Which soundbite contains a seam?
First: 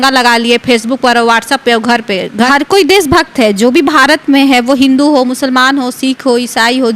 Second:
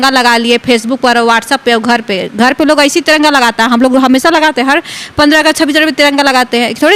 first; 1 cut; at 2.5 s

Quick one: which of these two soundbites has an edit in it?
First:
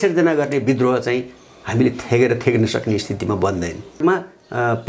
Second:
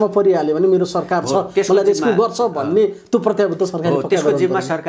first; 1 cut; at 4.0 s

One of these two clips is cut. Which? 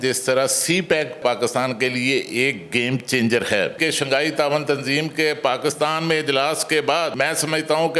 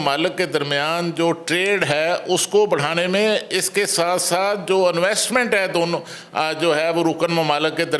first; 3 cuts; at 1.2 s, 3.8 s, 7.1 s

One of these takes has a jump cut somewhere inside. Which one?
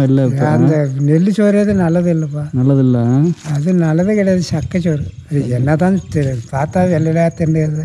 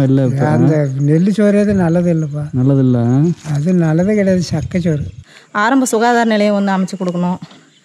second; 1 cut; at 5.1 s

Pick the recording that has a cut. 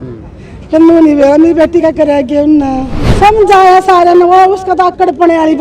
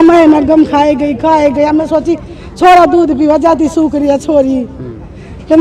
first; 1 cut; at 3.0 s

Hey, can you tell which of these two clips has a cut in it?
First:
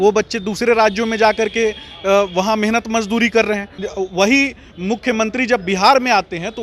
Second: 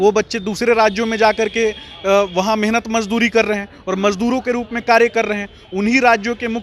first; 1 cut; at 3.7 s

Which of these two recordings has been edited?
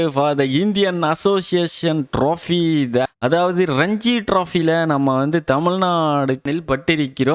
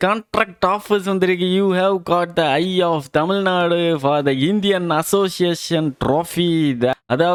first; 1 cut; at 6.4 s

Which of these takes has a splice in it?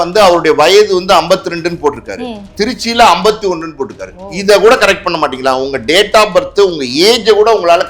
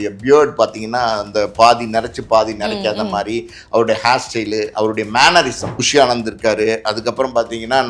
second; 1 cut; at 5.7 s

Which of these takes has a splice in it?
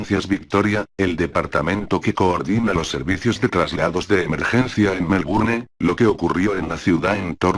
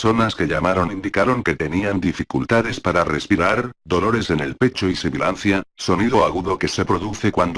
second; 1 cut; at 4.5 s

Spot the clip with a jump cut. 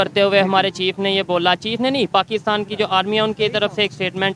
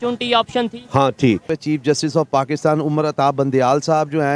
second; 1 cut; at 1.5 s

